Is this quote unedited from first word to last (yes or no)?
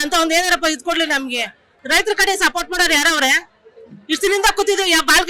no